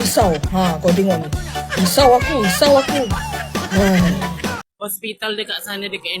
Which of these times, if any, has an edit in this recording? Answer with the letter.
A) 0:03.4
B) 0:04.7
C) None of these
B